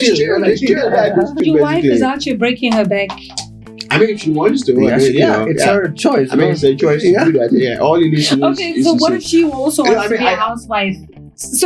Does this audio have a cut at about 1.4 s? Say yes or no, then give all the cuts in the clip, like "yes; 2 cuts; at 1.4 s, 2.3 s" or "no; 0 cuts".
yes; 1 cut; at 1.4 s